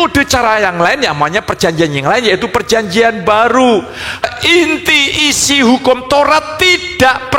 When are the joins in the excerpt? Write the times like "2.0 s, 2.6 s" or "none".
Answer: 4.3 s